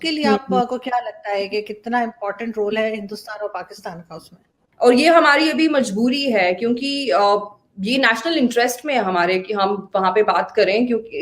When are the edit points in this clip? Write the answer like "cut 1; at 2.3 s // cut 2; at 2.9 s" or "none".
cut 1; at 4.6 s